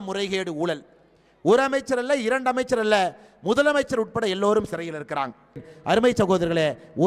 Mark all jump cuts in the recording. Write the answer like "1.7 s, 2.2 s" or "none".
5.7 s